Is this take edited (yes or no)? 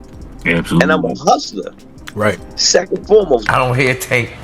yes